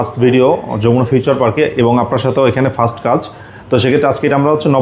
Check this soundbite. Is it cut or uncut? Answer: uncut